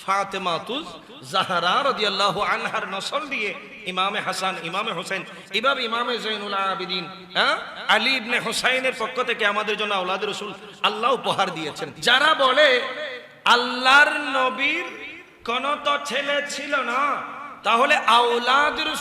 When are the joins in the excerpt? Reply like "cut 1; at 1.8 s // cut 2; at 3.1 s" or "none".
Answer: cut 1; at 11.9 s